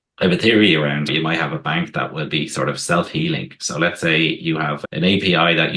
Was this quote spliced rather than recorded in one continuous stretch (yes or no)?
no